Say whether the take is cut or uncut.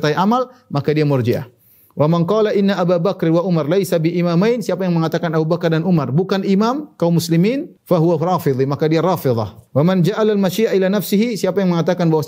cut